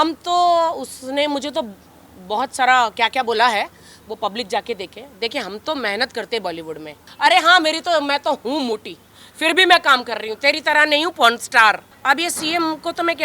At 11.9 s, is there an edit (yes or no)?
yes